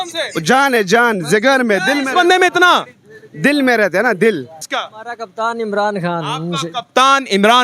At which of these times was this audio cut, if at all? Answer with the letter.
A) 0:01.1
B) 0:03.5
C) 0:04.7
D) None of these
C